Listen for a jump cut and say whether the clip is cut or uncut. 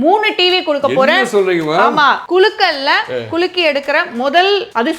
cut